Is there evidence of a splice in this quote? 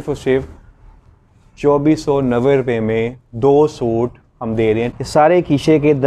yes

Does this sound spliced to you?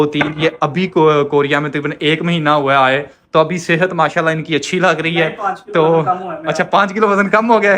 no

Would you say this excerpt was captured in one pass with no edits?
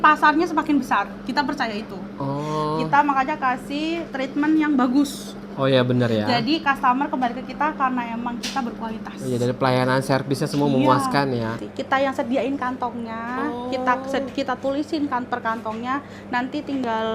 no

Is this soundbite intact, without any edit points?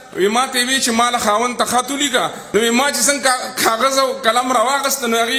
no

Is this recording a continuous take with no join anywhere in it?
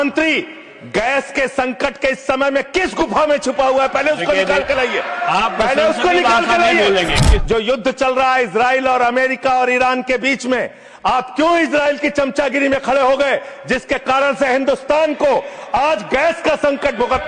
no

